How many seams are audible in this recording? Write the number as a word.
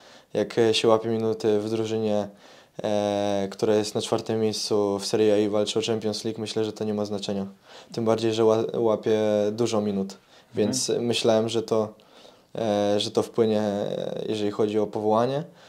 zero